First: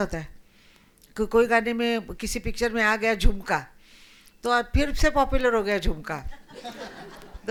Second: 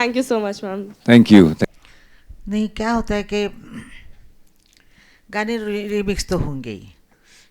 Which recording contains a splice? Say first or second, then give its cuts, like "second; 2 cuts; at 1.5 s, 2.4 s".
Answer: second; 1 cut; at 1.7 s